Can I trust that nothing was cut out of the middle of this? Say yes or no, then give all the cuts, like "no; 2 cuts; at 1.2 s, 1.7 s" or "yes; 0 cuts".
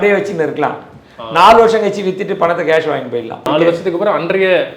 no; 1 cut; at 3.5 s